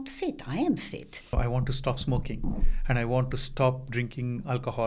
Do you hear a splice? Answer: yes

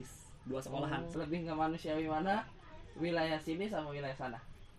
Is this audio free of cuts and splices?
no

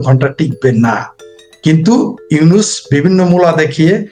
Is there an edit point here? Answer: no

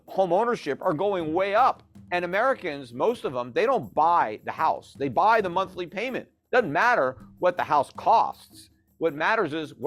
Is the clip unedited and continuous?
no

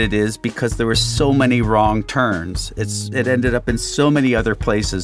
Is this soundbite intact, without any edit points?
yes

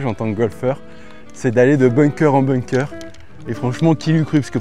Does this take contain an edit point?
no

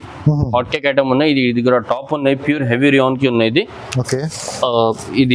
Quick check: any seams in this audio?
no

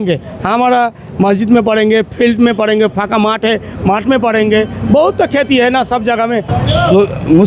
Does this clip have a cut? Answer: yes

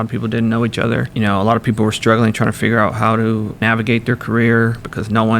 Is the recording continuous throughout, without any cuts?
no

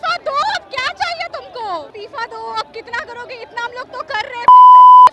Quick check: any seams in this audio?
yes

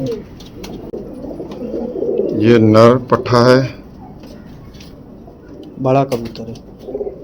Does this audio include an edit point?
yes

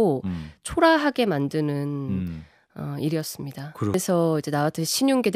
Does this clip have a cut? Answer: yes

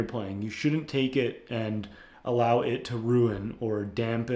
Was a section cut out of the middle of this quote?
no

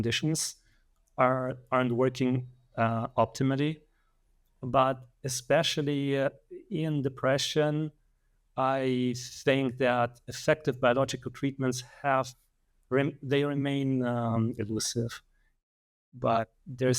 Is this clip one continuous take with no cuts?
no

